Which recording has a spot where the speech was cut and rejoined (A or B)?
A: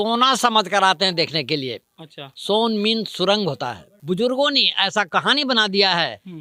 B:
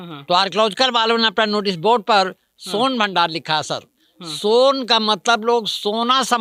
A